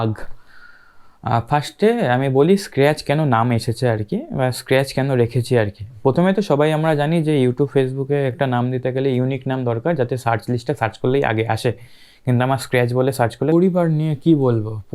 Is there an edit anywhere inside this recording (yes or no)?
yes